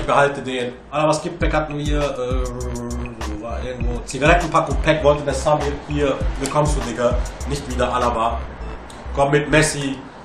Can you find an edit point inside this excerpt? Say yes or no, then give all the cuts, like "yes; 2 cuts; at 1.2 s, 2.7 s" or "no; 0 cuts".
yes; 1 cut; at 9.1 s